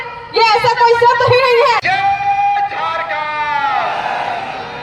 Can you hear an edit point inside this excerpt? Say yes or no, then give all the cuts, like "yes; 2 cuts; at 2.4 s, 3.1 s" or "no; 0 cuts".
yes; 1 cut; at 1.8 s